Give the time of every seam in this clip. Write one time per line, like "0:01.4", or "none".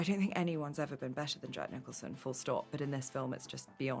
none